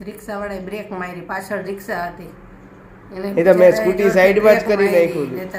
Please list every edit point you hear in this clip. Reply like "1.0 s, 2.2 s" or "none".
none